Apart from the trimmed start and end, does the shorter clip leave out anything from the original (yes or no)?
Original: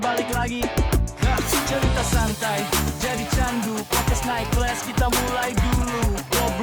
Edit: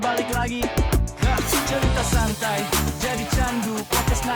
no